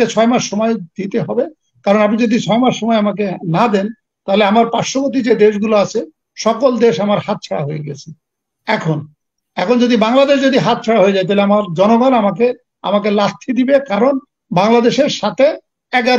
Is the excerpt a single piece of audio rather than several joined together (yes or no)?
yes